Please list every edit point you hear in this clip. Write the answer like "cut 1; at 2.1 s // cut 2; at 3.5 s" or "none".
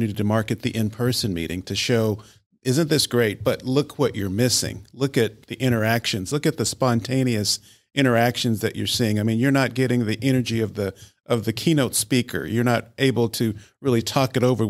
none

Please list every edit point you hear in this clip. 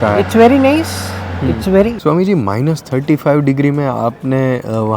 cut 1; at 2.0 s

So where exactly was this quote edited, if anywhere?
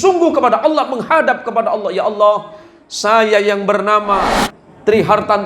cut 1; at 4.3 s

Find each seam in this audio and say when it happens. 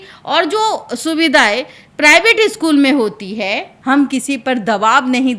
cut 1; at 3.7 s

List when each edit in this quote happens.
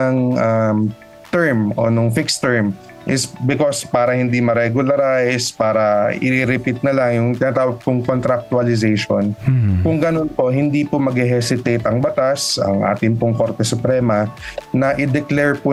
none

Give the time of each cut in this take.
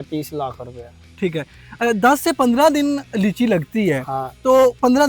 none

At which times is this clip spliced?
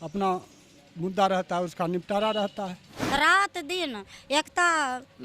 cut 1; at 2.9 s

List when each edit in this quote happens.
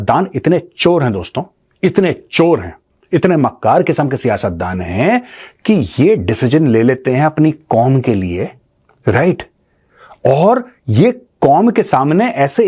none

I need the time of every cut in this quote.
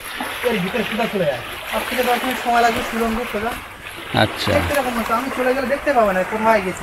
cut 1; at 1.5 s

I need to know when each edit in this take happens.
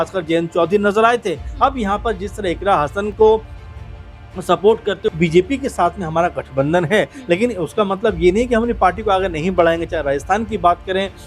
cut 1; at 5.1 s

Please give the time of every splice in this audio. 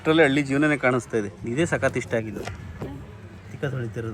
cut 1; at 1.4 s

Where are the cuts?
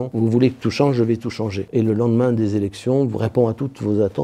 cut 1; at 1.6 s

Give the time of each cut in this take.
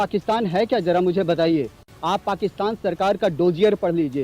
cut 1; at 1.8 s

